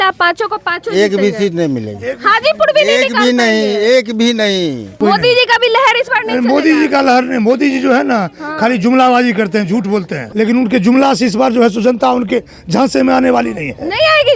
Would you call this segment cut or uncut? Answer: cut